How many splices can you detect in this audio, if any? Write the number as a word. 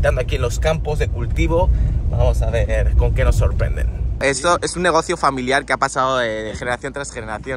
one